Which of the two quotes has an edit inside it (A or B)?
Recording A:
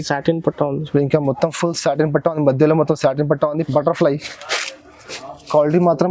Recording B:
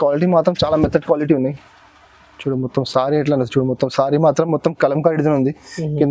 A